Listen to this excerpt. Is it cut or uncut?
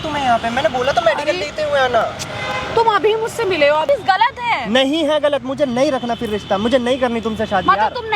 cut